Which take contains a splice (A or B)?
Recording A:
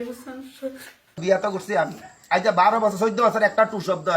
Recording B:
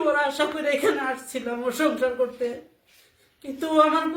A